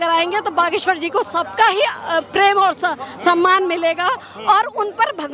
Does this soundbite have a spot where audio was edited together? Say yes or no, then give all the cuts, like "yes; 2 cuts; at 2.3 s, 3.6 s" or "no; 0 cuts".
no; 0 cuts